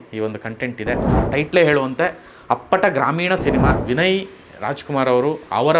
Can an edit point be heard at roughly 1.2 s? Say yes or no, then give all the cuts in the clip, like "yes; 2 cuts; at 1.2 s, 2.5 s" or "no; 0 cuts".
yes; 2 cuts; at 1.2 s, 3.8 s